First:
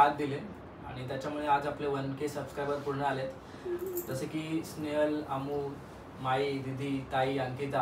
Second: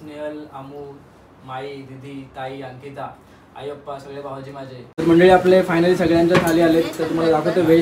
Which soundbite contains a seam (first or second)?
second